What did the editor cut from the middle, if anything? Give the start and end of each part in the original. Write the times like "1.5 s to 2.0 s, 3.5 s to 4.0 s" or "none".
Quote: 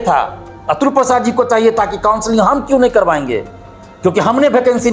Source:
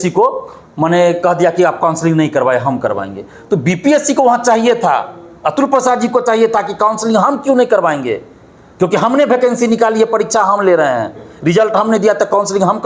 none